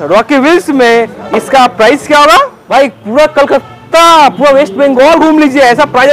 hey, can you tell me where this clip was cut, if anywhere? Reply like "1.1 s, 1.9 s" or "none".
2.6 s